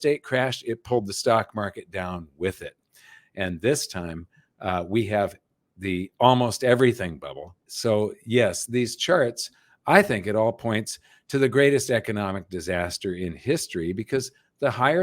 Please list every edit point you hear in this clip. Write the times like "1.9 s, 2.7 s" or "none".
7.7 s, 8.6 s